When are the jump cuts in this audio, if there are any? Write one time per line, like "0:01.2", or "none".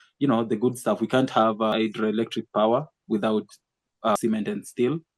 0:01.7
0:04.2